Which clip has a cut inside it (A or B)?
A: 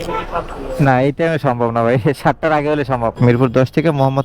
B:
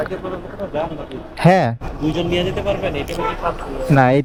A